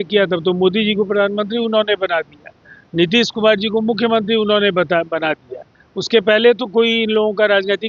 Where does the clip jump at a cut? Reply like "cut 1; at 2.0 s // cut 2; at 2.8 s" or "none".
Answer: none